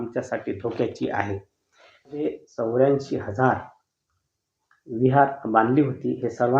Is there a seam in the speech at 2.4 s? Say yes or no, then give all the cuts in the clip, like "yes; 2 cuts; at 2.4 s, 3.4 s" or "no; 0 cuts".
yes; 1 cut; at 2.4 s